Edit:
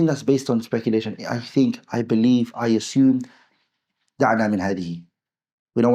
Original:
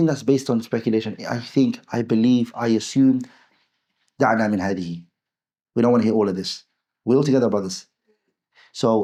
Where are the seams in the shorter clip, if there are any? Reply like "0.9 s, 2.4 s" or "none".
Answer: none